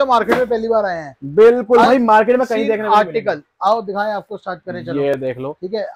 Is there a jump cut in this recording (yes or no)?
no